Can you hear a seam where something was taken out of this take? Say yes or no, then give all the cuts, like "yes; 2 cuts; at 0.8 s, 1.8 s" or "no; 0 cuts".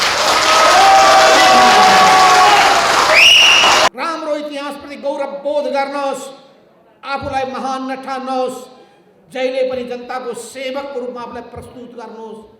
yes; 1 cut; at 3.9 s